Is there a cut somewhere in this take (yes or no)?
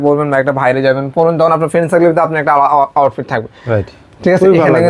no